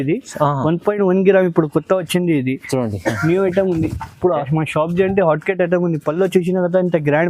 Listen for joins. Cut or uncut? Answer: uncut